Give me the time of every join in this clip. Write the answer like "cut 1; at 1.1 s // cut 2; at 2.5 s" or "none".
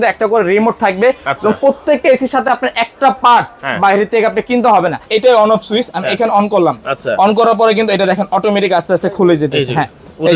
cut 1; at 5.1 s